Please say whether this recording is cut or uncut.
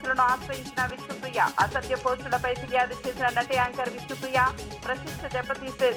uncut